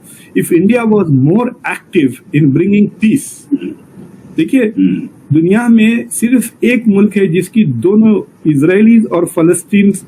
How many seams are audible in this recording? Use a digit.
0